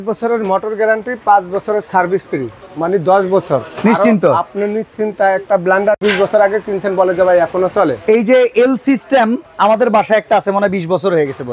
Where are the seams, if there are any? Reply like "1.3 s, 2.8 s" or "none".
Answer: none